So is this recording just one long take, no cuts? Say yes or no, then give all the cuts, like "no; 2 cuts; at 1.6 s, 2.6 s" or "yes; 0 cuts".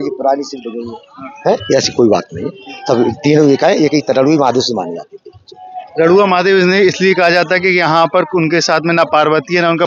yes; 0 cuts